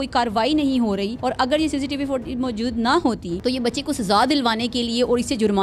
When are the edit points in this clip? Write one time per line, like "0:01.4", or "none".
0:01.1
0:03.3